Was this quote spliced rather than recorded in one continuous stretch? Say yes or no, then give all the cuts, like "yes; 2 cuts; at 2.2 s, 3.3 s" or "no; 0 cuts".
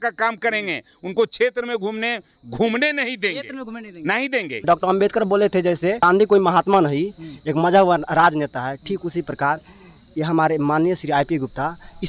yes; 2 cuts; at 4.6 s, 6.0 s